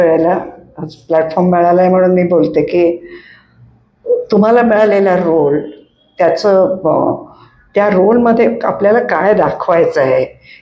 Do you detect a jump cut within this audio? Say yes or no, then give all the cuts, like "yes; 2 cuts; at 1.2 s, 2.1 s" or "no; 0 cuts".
no; 0 cuts